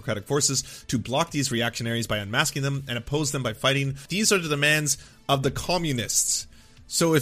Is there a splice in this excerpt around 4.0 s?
yes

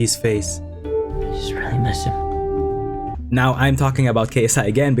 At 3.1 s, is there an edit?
yes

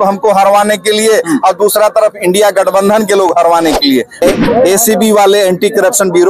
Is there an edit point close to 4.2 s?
yes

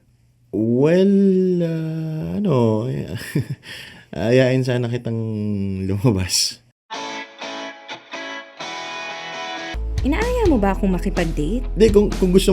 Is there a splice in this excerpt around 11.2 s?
no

